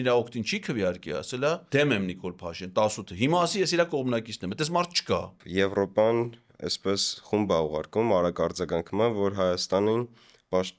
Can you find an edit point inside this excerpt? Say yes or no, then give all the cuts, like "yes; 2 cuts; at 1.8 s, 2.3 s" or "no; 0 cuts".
yes; 2 cuts; at 1.6 s, 5.4 s